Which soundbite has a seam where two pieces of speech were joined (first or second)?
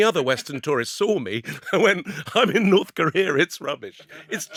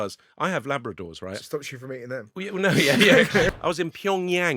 second